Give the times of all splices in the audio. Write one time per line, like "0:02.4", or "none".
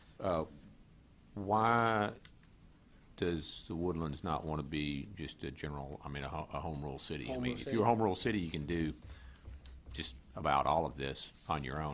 none

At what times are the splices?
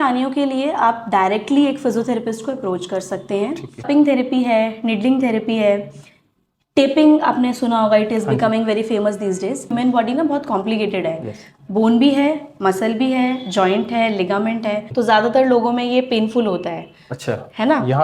0:03.8
0:09.7
0:14.9

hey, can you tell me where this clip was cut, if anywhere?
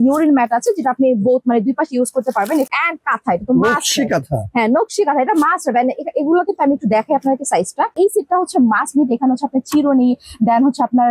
0:02.7
0:07.9

